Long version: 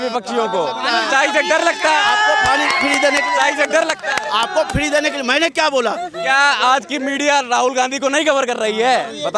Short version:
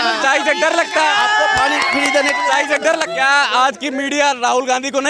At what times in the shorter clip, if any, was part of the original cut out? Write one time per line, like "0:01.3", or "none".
0:03.1